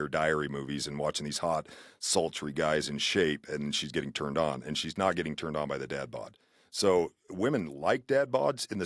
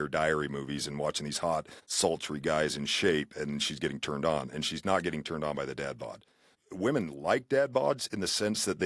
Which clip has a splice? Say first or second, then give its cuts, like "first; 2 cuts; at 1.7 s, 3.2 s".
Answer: second; 2 cuts; at 1.8 s, 6.6 s